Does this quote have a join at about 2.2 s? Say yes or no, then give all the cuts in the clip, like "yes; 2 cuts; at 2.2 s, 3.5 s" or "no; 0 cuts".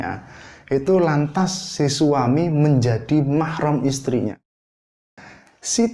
no; 1 cut; at 4.8 s